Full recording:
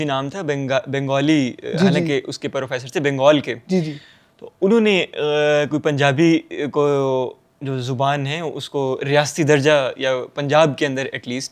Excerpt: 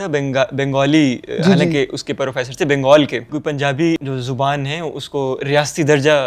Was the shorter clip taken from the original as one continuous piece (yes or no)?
no